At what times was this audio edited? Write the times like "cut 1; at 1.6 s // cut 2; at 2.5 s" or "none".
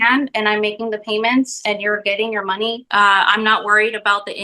cut 1; at 2.8 s

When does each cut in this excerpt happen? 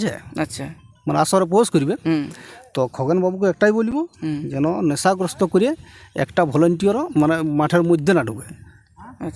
none

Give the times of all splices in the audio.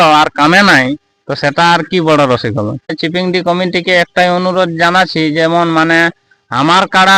cut 1; at 3.0 s

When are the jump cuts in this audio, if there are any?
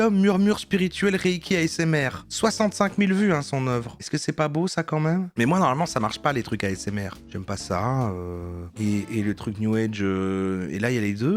none

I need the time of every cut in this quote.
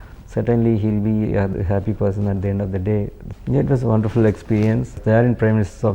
cut 1; at 1.5 s // cut 2; at 3.2 s // cut 3; at 5.0 s

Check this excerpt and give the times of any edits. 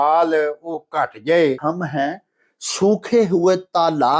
cut 1; at 1.6 s

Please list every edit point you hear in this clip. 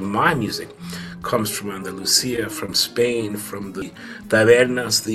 cut 1; at 3.8 s

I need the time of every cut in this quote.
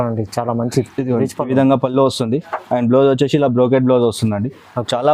none

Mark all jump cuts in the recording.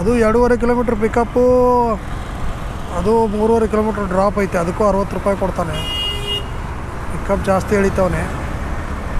none

